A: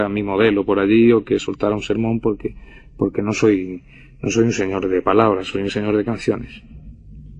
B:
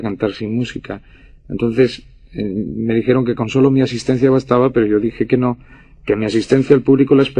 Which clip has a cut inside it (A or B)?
B